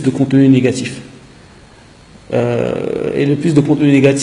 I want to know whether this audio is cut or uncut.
uncut